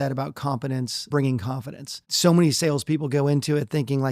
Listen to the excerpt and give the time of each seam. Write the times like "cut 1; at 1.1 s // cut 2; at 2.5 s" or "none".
cut 1; at 1.1 s // cut 2; at 2.1 s